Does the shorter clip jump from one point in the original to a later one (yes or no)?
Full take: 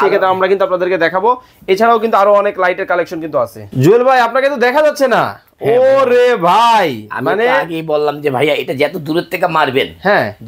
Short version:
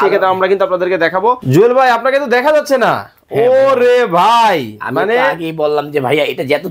yes